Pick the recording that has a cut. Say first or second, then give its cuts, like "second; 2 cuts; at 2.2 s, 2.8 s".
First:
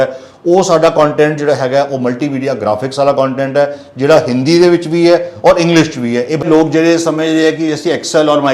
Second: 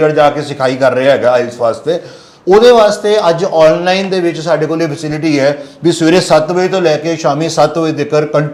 first; 1 cut; at 6.5 s